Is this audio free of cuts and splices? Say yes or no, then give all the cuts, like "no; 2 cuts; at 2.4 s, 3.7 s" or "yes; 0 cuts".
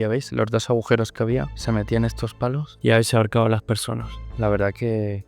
no; 3 cuts; at 1.5 s, 2.7 s, 4.3 s